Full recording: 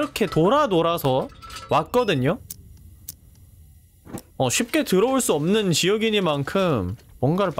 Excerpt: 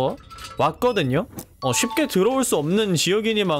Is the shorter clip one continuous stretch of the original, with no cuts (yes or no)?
no